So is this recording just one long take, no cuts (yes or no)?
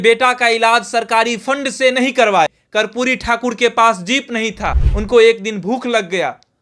no